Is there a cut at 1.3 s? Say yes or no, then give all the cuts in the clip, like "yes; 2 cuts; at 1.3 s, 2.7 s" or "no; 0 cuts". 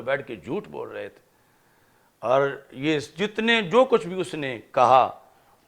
no; 0 cuts